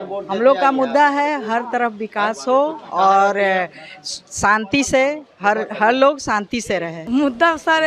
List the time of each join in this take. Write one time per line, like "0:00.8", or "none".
0:07.0